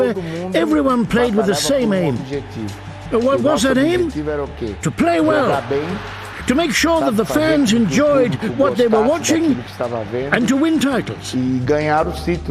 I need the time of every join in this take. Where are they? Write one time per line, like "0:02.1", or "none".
0:11.2